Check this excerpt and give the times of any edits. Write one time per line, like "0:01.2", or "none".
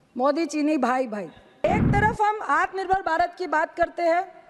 0:01.6